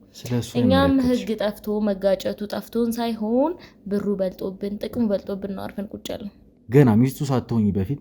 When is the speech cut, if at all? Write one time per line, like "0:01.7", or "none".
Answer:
0:06.4